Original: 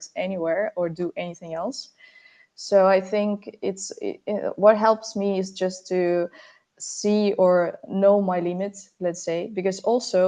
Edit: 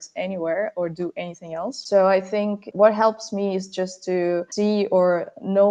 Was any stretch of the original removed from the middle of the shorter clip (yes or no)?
yes